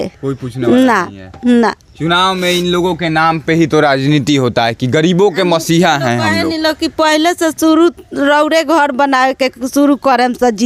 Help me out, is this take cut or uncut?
uncut